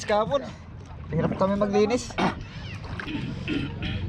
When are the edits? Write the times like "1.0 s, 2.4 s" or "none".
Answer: 3.0 s